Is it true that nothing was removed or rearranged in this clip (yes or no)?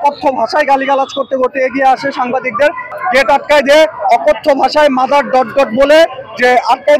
no